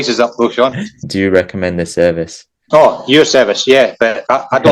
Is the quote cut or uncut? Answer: cut